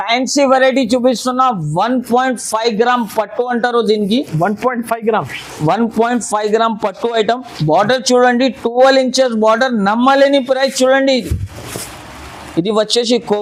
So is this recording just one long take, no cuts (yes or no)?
yes